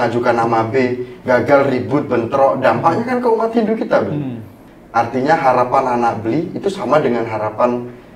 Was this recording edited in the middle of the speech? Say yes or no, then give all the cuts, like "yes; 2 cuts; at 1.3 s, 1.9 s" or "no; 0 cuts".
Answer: yes; 1 cut; at 4.6 s